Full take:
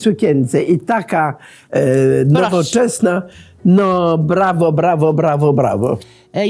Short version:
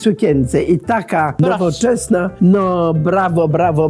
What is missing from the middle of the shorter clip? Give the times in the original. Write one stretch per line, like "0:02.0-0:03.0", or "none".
0:01.4-0:02.3
0:03.2-0:03.5